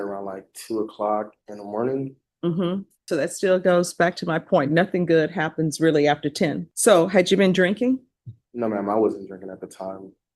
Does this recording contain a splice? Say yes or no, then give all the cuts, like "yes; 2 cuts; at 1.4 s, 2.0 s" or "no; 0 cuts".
yes; 2 cuts; at 2.9 s, 6.7 s